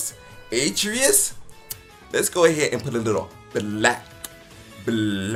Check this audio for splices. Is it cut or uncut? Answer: uncut